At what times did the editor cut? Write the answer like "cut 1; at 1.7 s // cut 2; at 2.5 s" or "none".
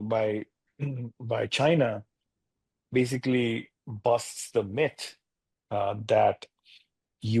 none

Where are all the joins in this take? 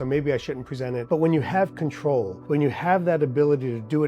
cut 1; at 1.0 s // cut 2; at 2.4 s

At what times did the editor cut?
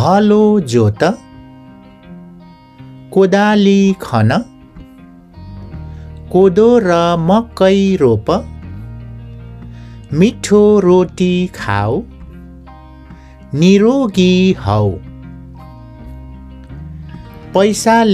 cut 1; at 1.2 s // cut 2; at 2.6 s // cut 3; at 4.5 s // cut 4; at 5.9 s // cut 5; at 15.0 s // cut 6; at 16.8 s

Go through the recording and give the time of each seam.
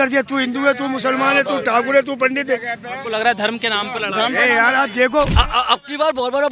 cut 1; at 5.3 s

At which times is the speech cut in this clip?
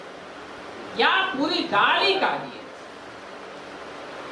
none

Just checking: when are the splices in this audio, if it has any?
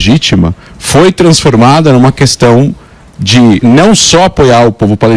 cut 1; at 3.6 s

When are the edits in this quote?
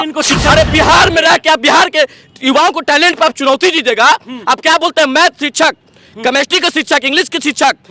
none

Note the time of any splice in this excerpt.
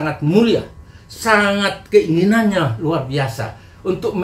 none

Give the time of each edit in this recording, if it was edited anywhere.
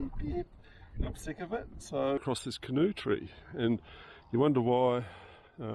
cut 1; at 2.2 s

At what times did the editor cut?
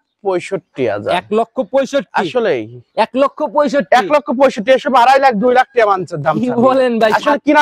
none

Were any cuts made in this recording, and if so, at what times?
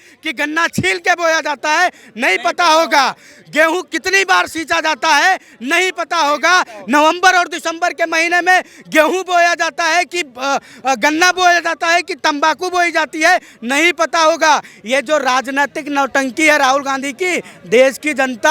none

